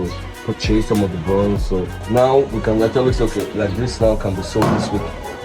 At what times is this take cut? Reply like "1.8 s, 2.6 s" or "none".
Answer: 2.0 s